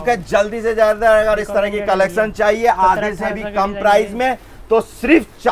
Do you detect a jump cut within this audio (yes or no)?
no